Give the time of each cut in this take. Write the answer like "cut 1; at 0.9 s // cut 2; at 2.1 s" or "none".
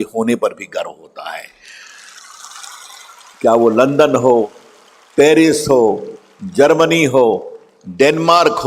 cut 1; at 3.3 s